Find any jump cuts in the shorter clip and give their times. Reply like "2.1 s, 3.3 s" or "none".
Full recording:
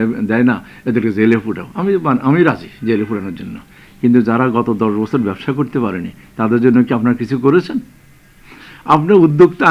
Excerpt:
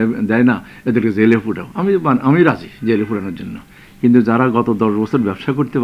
none